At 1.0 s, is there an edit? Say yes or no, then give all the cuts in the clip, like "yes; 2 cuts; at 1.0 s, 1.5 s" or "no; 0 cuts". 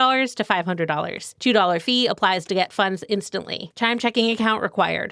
no; 0 cuts